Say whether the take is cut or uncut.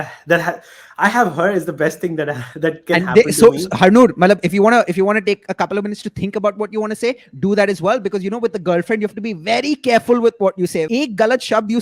cut